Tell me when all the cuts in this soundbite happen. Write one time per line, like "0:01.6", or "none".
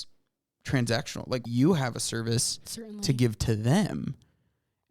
0:01.4